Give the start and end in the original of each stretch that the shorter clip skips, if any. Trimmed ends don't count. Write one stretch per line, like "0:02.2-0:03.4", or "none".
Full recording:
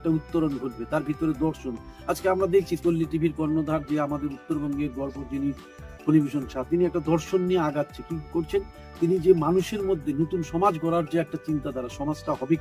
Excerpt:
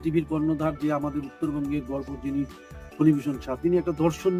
none

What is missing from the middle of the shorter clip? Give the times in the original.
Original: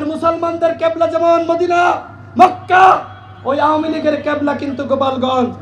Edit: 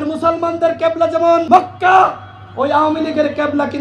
0:01.4-0:02.3

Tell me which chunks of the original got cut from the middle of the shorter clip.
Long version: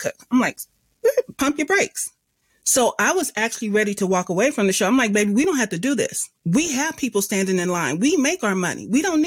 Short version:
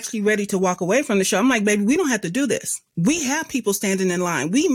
none

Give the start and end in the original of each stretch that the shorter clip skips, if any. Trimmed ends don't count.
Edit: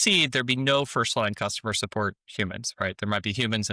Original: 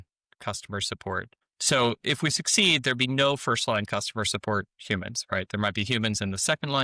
none

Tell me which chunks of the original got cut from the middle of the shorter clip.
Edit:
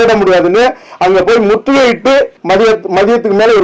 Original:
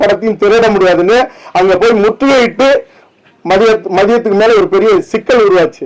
0:02.9-0:03.4

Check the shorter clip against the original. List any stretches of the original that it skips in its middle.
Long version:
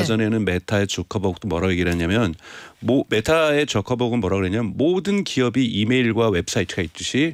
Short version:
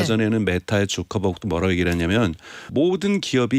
0:02.7-0:04.7

